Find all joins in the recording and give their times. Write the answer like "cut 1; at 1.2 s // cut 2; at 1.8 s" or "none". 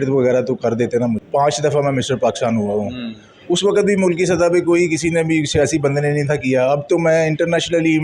cut 1; at 1.2 s